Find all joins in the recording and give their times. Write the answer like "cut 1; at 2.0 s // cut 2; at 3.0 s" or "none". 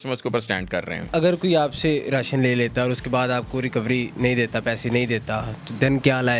cut 1; at 1.1 s